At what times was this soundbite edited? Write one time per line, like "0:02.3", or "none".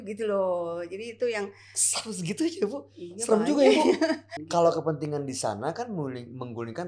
0:04.3